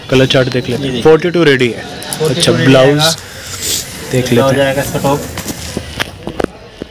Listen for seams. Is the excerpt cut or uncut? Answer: uncut